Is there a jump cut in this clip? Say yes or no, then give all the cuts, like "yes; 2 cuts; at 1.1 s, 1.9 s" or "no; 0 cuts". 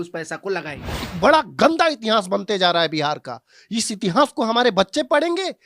yes; 1 cut; at 1.1 s